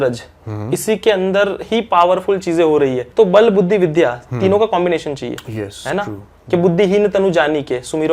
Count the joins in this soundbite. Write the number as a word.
one